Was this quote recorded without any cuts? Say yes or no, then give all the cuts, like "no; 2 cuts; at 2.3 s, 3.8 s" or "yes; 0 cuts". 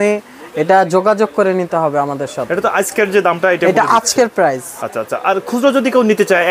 yes; 0 cuts